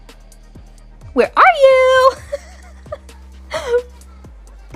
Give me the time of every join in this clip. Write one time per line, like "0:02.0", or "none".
0:01.1